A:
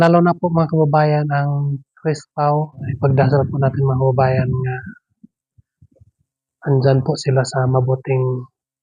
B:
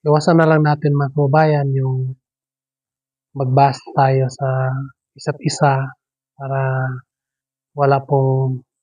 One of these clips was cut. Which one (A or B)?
A